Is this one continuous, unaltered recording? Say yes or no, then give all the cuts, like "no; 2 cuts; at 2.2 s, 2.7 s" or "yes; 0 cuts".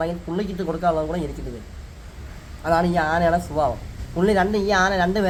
yes; 0 cuts